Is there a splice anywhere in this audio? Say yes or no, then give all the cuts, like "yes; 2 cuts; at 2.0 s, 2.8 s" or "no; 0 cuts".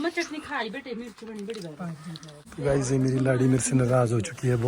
yes; 1 cut; at 2.4 s